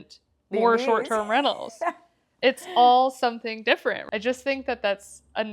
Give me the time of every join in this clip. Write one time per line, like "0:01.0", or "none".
0:04.0